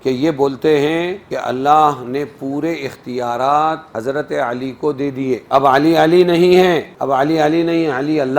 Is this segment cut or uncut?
cut